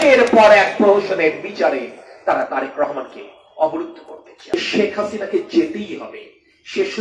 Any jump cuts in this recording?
yes; 1 cut; at 4.3 s

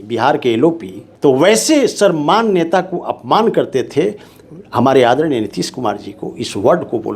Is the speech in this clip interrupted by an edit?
yes; 1 cut; at 1.0 s

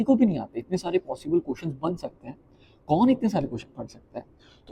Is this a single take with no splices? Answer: yes; 0 cuts

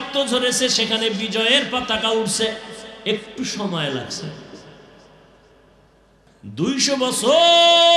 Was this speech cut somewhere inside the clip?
yes; 1 cut; at 6.2 s

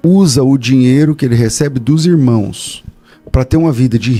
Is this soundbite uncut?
yes; 0 cuts

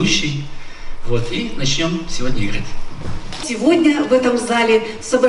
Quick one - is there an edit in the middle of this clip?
yes; 1 cut; at 3.5 s

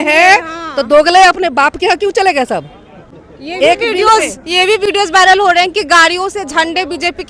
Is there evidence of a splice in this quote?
no; 0 cuts

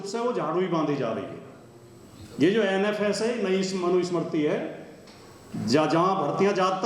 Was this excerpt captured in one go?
yes; 0 cuts

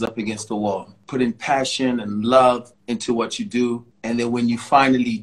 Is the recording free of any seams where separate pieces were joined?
no; 3 cuts; at 1.0 s, 2.7 s, 3.9 s

